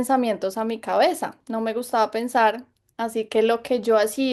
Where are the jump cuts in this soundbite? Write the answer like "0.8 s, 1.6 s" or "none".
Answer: 1.4 s

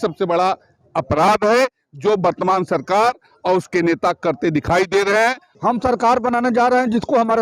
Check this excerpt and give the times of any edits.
5.5 s

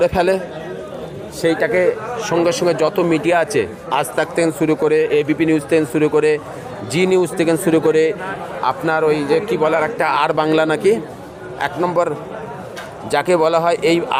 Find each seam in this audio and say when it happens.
none

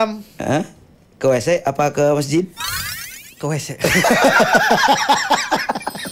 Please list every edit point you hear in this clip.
none

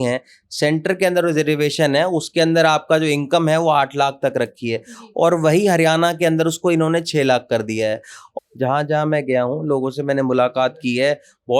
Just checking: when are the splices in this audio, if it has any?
8.3 s

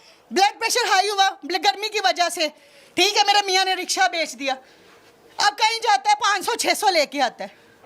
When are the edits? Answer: none

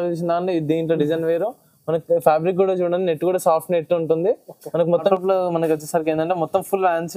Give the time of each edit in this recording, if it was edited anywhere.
5.1 s

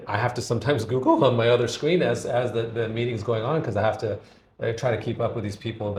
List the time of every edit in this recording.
none

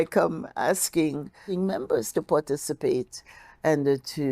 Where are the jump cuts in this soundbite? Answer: 1.4 s

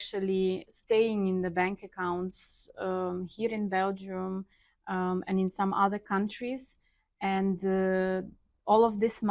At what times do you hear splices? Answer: none

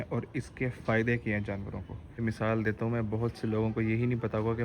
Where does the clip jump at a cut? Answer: 2.2 s

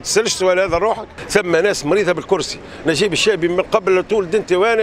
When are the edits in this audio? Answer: 1.1 s

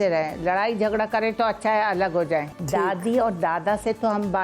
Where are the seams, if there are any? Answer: 2.6 s

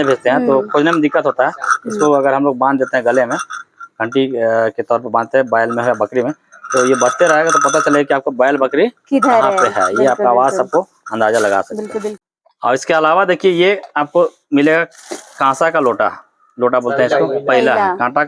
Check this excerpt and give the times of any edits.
12.1 s

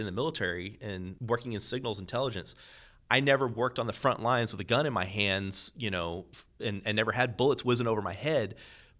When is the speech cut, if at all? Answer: 1.1 s

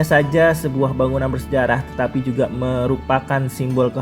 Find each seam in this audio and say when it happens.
none

